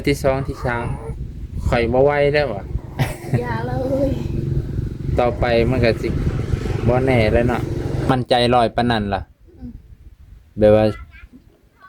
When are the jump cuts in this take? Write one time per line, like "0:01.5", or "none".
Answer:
0:08.1